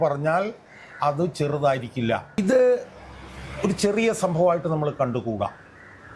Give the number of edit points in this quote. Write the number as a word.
one